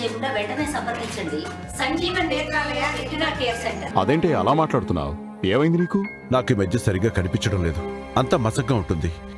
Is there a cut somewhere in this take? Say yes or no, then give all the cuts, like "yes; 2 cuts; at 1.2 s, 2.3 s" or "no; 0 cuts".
yes; 1 cut; at 3.8 s